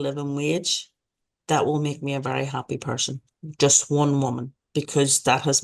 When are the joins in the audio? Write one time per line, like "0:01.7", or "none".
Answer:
none